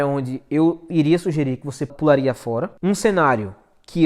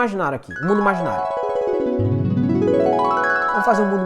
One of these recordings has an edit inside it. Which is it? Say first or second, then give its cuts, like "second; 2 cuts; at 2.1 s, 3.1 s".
first; 2 cuts; at 1.9 s, 2.7 s